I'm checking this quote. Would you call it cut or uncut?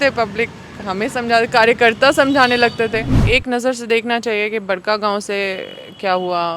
cut